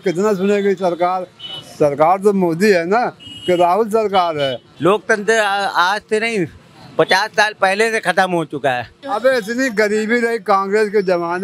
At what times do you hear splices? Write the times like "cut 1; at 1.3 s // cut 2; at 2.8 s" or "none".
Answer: cut 1; at 4.6 s // cut 2; at 9.0 s